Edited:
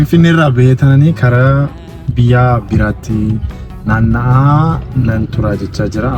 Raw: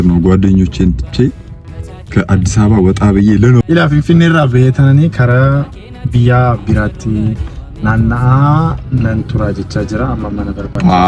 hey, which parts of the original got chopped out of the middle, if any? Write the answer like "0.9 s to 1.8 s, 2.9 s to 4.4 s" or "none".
none